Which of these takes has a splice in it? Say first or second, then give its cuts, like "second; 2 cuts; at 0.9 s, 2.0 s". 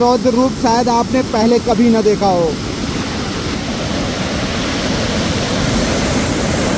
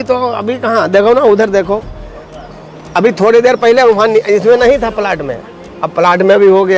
first; 1 cut; at 3.5 s